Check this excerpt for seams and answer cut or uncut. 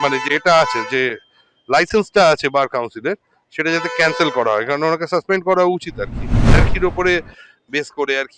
cut